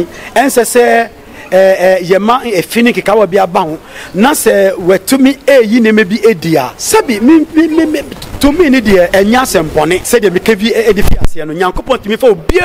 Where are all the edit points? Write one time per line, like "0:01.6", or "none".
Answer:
0:06.8
0:09.1
0:10.0